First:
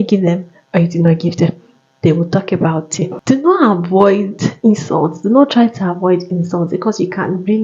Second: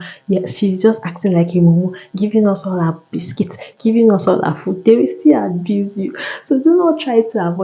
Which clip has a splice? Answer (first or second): first